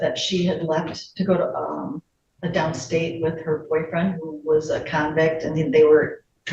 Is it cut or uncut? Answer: uncut